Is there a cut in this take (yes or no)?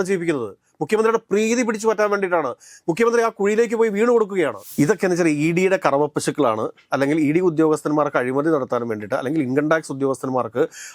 yes